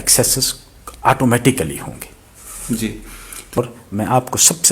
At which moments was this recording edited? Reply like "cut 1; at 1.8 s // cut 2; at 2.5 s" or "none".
cut 1; at 3.6 s